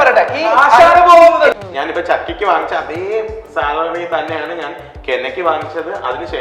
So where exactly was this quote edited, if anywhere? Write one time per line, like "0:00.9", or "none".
0:01.5